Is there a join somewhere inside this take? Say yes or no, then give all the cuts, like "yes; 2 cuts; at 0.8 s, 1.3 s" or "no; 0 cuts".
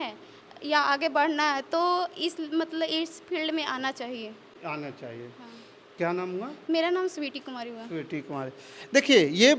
no; 0 cuts